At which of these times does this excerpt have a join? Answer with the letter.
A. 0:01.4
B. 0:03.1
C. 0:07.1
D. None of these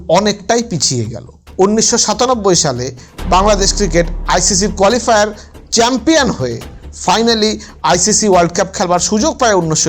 A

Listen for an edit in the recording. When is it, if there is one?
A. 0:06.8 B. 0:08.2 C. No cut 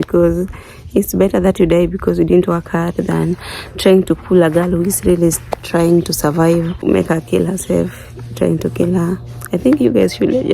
A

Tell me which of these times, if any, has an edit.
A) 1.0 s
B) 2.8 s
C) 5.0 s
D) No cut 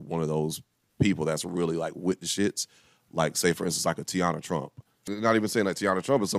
C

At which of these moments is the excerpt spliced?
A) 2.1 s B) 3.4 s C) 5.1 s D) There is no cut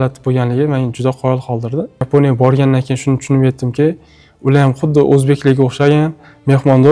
A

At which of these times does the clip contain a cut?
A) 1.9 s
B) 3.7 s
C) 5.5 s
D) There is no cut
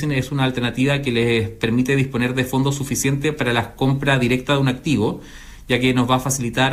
D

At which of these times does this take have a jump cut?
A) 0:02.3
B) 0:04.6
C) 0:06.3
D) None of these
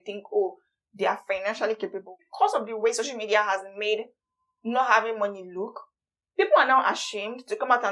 A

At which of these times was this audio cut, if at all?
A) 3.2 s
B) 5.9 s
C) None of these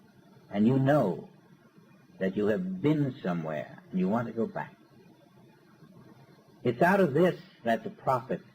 B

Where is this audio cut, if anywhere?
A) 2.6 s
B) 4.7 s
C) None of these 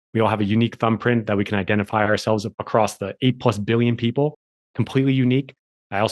A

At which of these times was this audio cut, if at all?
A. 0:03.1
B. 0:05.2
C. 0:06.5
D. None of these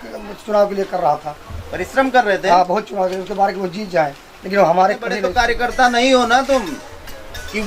B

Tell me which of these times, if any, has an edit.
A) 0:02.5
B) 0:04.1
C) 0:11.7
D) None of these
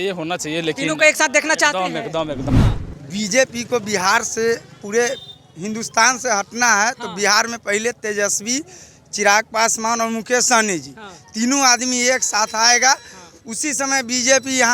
A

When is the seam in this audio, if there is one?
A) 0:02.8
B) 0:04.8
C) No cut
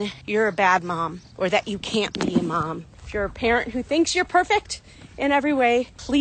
A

